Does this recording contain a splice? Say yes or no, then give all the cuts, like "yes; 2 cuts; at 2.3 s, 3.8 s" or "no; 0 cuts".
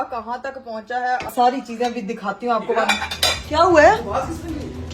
yes; 1 cut; at 1.3 s